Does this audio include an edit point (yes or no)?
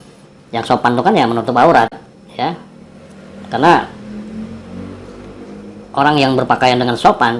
no